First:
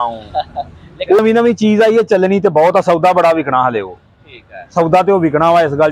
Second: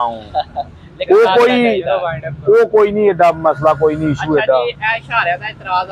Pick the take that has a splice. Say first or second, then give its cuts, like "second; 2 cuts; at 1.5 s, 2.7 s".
first; 1 cut; at 1.2 s